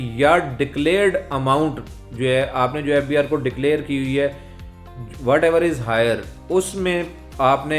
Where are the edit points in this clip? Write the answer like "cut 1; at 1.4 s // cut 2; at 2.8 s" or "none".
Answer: none